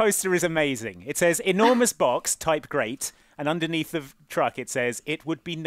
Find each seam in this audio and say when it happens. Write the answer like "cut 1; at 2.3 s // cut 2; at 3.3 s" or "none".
none

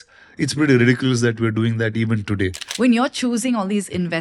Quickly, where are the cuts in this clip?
cut 1; at 2.6 s

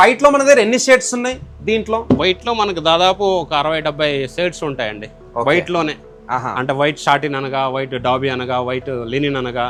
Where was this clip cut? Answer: none

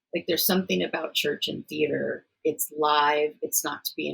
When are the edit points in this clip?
cut 1; at 2.3 s

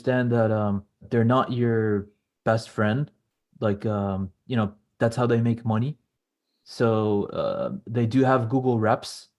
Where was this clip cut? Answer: cut 1; at 1.0 s

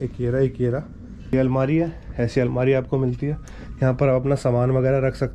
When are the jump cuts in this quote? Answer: cut 1; at 1.3 s

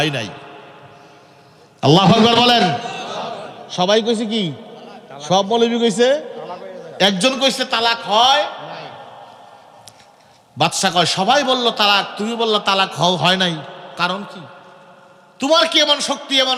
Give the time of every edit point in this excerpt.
none

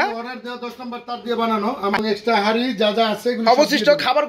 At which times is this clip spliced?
cut 1; at 2.0 s

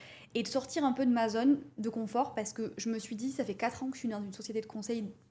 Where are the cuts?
none

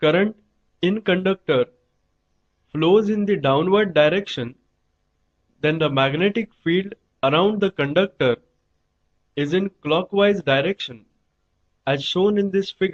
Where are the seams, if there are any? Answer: none

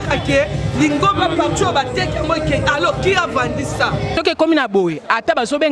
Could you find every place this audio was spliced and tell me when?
cut 1; at 4.2 s

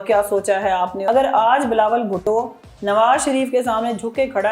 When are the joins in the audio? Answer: cut 1; at 1.1 s

